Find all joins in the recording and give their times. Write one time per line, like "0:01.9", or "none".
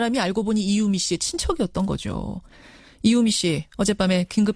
0:03.5